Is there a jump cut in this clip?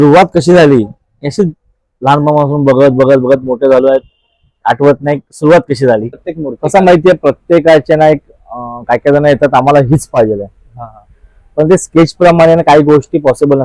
yes; 1 cut; at 6.3 s

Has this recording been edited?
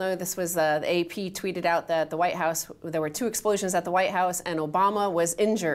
yes; 1 cut; at 2.6 s

